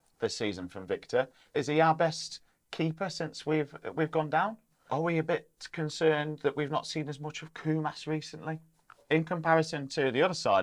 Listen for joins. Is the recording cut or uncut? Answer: cut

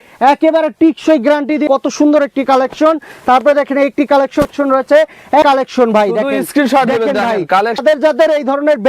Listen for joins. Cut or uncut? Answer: cut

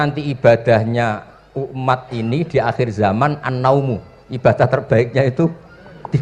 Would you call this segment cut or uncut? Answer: uncut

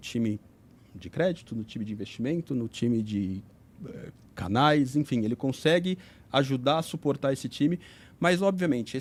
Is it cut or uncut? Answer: uncut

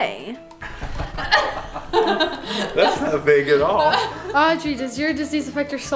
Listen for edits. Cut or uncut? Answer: cut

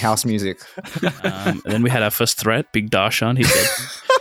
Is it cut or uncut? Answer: cut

